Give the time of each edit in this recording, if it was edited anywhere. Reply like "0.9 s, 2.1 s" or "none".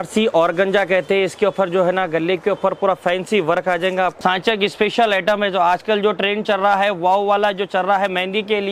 4.1 s